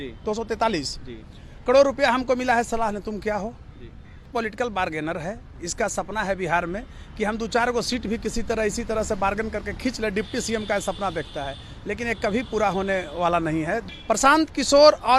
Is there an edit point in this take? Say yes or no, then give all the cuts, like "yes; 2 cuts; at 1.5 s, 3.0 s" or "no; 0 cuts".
yes; 2 cuts; at 4.4 s, 13.8 s